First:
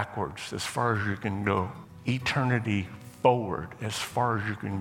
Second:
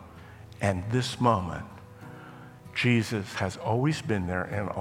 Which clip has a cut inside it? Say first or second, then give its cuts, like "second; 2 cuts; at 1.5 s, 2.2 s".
first; 1 cut; at 1.8 s